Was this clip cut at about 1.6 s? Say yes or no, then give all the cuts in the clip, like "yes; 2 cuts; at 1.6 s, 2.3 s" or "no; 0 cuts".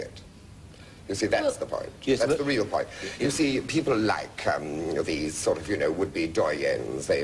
yes; 1 cut; at 1.6 s